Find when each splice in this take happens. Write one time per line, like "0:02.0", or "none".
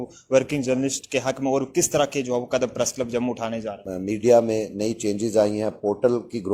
0:03.9